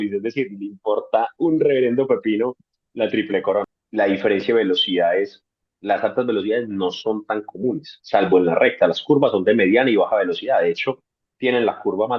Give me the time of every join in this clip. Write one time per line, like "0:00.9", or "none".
0:03.7